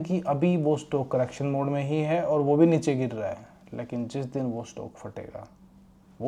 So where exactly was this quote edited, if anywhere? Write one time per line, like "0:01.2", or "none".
none